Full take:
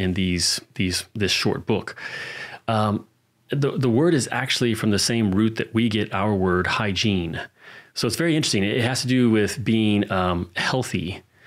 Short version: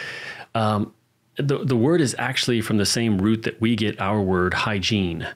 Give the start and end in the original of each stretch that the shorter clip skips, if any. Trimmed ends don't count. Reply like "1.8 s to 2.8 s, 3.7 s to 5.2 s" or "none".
none